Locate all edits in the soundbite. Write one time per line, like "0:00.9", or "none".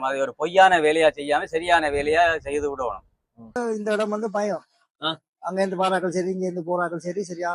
0:03.6